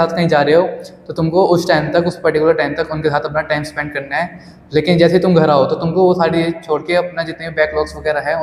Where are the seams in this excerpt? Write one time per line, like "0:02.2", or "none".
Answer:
none